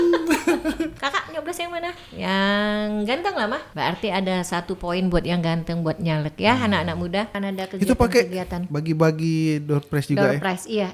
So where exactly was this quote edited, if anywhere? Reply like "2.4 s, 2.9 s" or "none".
0.9 s, 3.7 s, 7.3 s